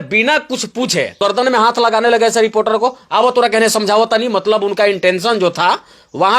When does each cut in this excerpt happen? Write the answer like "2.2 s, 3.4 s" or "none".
1.2 s

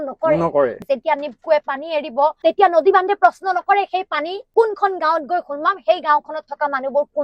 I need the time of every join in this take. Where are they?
0.8 s, 2.4 s, 4.4 s

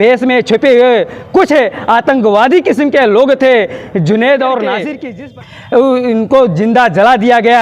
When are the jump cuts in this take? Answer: 4.9 s

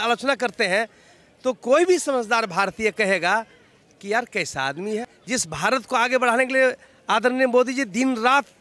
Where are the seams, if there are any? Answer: 5.2 s

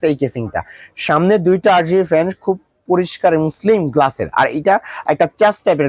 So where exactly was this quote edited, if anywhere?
none

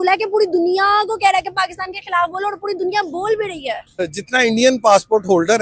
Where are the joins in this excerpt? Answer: 4.1 s

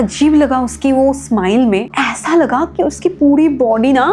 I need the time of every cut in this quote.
1.9 s

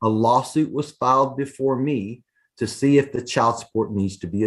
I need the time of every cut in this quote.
none

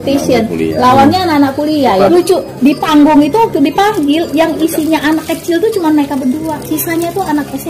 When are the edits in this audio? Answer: none

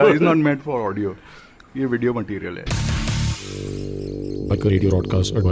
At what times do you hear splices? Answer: 2.6 s

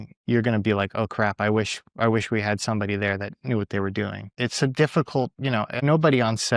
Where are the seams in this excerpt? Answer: 4.2 s, 5.8 s

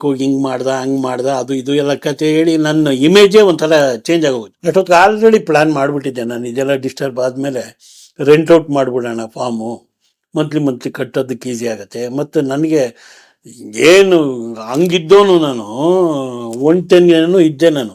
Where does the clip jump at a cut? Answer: 4.5 s

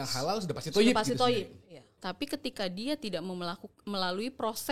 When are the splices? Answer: 1.7 s

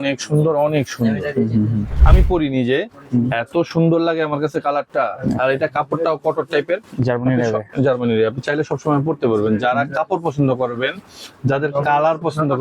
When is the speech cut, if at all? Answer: 1.9 s

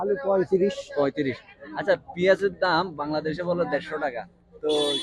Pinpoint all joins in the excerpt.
none

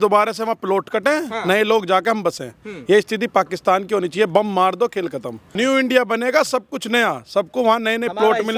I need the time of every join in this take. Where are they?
5.4 s

